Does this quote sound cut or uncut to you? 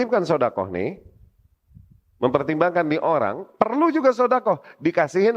uncut